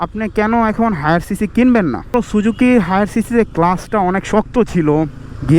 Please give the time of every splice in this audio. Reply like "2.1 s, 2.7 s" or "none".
2.1 s